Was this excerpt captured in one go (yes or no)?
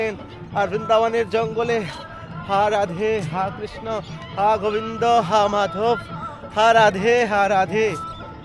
yes